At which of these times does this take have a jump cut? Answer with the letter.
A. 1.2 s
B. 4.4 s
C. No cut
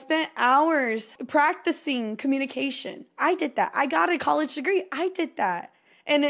A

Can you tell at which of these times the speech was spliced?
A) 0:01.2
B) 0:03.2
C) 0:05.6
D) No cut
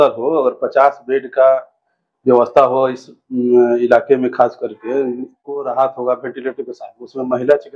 C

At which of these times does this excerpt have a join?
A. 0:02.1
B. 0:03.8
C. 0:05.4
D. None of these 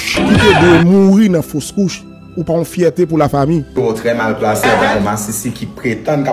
B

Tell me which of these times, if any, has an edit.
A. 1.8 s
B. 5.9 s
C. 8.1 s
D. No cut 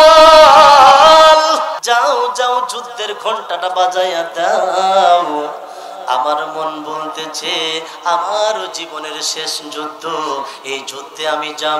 A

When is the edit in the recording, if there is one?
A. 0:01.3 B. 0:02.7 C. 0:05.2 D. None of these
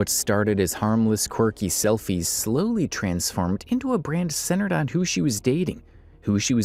D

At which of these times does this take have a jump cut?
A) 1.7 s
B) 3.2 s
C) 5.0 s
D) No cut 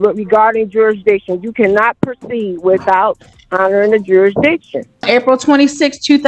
C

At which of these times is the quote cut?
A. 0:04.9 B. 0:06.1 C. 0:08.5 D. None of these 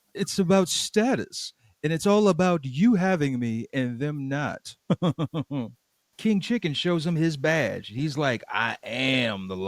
B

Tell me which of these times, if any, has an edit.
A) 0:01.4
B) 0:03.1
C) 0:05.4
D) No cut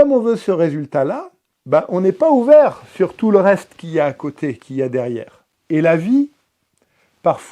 D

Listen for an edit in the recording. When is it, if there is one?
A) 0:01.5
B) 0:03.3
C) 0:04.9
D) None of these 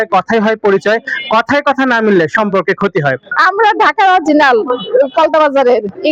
B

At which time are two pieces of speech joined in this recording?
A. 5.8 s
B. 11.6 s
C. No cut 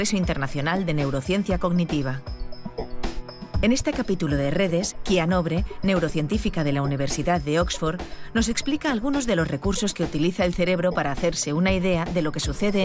B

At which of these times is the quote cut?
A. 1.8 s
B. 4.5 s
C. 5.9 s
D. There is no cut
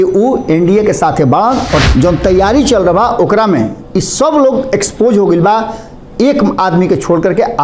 A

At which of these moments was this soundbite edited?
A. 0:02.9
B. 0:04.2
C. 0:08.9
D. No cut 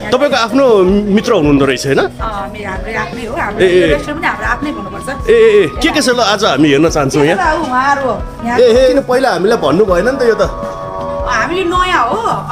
C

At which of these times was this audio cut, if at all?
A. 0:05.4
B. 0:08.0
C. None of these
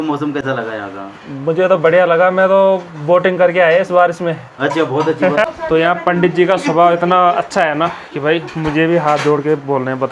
A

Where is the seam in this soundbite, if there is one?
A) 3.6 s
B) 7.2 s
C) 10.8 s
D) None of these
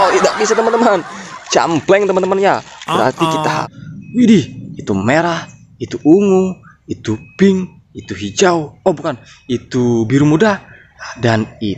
A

